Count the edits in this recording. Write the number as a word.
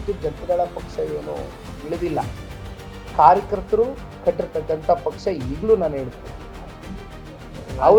zero